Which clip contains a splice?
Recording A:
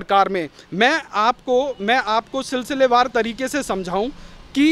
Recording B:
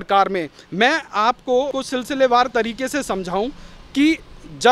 B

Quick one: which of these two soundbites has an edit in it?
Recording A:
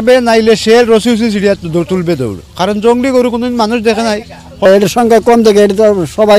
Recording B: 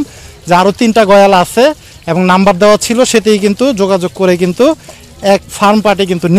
A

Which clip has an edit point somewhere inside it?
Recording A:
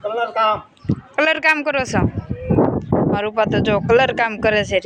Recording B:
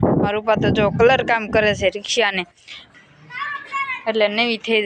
B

